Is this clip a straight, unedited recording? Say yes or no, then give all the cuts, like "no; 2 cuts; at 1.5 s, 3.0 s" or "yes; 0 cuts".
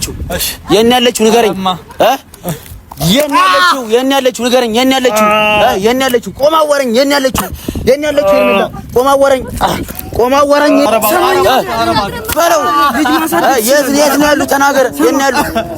no; 1 cut; at 10.9 s